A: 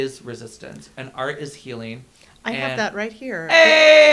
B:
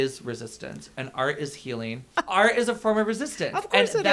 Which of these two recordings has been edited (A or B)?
B